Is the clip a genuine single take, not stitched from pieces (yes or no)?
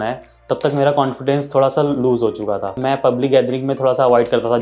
no